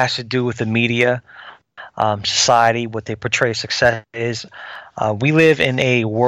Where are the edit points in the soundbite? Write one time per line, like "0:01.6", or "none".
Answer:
none